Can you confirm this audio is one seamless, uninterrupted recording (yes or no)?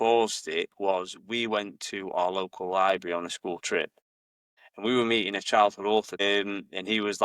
no